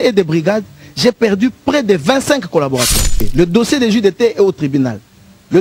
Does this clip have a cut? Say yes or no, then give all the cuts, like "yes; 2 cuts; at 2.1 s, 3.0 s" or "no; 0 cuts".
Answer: yes; 1 cut; at 3.3 s